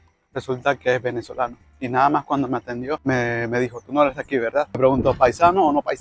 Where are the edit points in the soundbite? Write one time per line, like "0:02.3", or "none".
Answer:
0:03.0
0:04.8